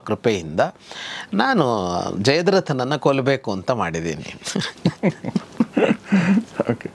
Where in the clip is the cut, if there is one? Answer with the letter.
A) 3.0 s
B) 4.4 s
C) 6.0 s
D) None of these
D